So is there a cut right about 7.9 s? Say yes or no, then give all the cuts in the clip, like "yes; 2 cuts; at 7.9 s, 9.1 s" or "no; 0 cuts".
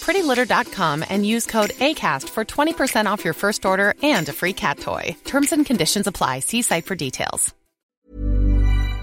yes; 1 cut; at 7.9 s